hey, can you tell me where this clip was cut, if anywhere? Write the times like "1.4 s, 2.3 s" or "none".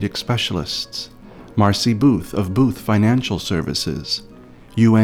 none

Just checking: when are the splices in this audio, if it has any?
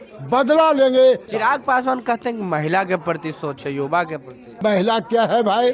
1.3 s, 4.6 s

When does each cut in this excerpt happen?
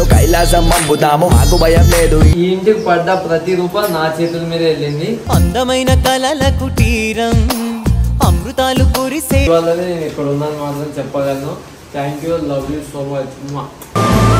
2.3 s, 9.5 s

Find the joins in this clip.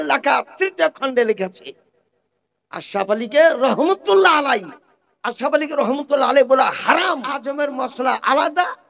7.4 s

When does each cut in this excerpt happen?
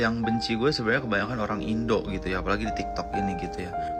none

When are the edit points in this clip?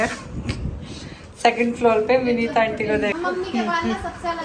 3.1 s

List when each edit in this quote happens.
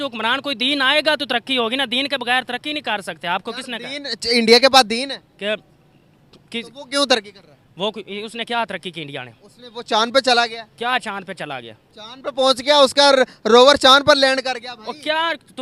none

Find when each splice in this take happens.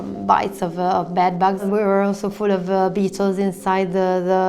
1.6 s

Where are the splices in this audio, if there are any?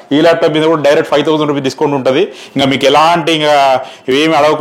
none

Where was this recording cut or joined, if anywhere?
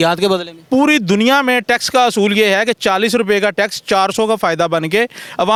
none

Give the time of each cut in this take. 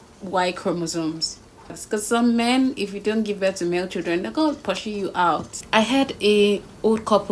1.7 s, 5.7 s

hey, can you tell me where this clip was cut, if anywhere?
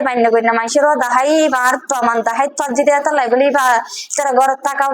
none

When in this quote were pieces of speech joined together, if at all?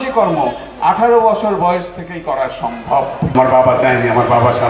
3.4 s

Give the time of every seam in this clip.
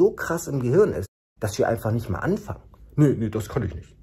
none

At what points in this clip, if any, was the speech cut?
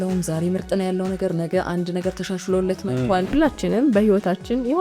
3.3 s

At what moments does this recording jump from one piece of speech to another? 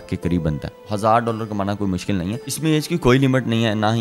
2.5 s

